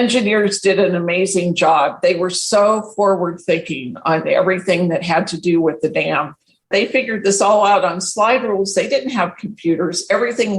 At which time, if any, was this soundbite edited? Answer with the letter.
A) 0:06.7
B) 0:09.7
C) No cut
A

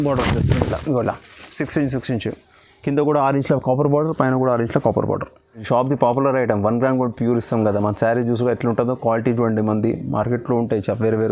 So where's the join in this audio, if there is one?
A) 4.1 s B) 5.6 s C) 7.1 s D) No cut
B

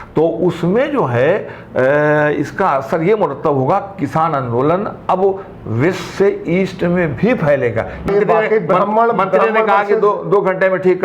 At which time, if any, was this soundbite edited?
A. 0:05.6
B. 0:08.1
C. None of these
B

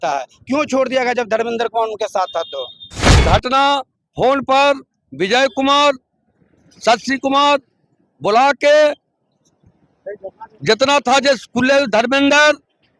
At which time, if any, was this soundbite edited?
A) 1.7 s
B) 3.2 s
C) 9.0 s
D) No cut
B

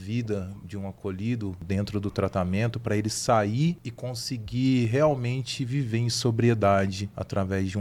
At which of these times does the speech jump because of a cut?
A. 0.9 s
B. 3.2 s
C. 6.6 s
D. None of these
D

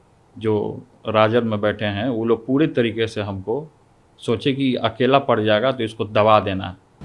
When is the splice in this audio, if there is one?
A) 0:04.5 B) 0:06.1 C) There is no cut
C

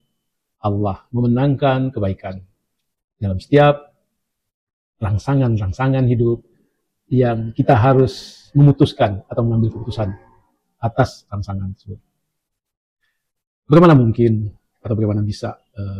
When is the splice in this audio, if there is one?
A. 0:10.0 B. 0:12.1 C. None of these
C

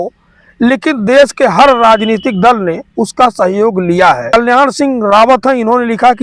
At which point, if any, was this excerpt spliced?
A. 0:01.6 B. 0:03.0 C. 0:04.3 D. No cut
C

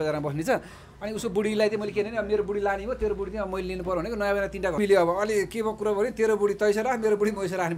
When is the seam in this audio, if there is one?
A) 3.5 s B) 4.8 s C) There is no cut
B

